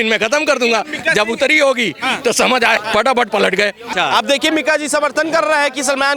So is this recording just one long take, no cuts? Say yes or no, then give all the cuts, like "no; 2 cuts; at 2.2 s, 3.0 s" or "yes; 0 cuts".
no; 1 cut; at 3.9 s